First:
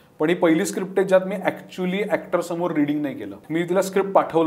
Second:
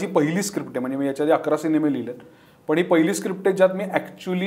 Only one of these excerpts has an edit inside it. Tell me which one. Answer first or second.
first